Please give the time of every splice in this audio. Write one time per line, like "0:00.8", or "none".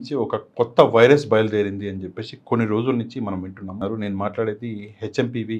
0:03.7